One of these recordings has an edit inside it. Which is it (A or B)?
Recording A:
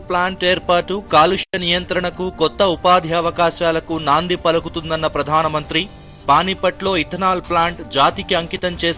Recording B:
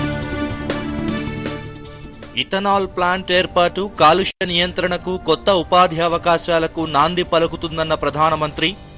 B